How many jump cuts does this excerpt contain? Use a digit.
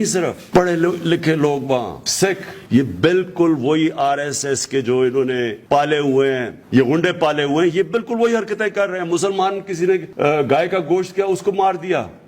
4